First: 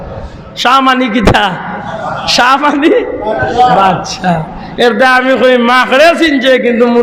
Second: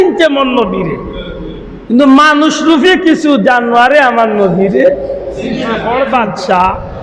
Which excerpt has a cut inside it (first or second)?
second